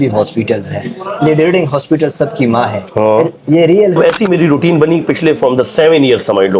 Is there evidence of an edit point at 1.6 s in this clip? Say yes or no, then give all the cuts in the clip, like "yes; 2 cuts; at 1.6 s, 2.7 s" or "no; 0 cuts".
no; 1 cut; at 4.0 s